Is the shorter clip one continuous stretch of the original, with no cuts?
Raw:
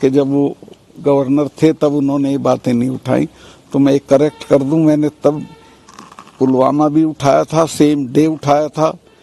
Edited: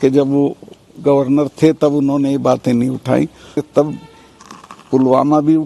no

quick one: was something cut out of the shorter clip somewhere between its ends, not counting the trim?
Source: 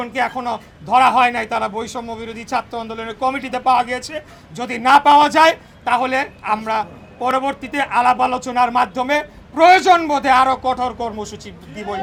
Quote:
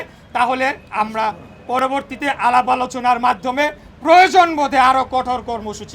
no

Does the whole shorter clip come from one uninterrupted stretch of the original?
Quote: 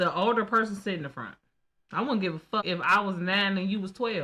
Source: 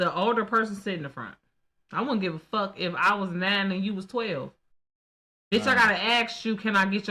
no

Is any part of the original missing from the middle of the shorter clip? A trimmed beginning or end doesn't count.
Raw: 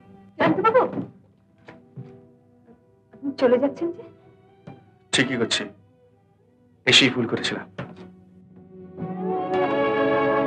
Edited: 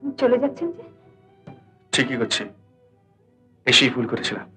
no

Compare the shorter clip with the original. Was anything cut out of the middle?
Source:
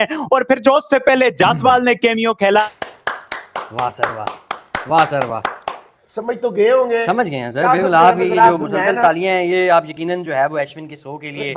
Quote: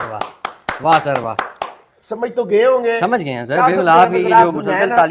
no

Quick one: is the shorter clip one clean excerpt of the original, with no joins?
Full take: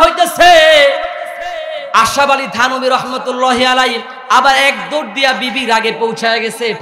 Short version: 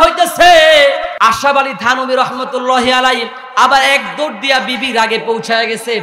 no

